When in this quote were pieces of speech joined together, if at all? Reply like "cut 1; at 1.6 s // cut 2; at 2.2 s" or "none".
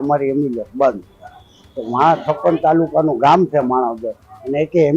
none